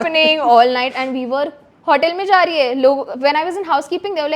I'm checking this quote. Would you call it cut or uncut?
cut